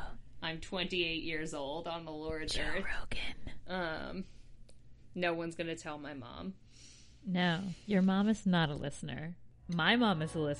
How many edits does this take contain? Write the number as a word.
one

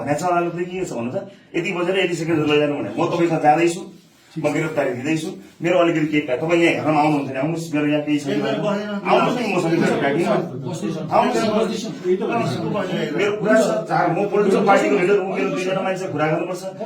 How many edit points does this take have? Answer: zero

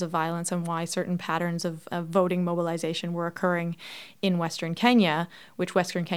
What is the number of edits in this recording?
zero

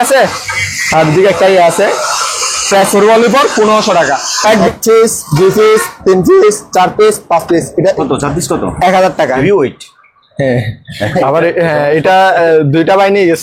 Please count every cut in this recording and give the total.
three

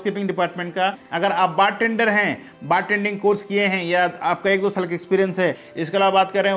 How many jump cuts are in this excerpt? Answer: two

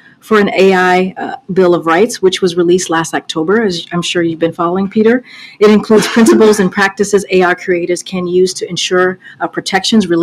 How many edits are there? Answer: two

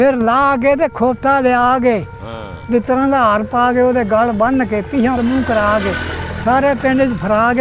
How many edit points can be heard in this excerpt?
one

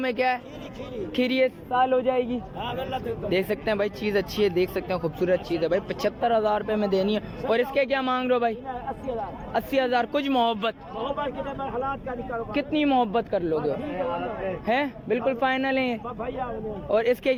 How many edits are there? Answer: zero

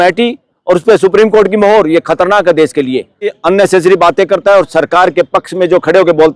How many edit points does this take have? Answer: one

